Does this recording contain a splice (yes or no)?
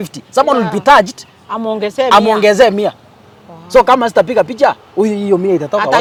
no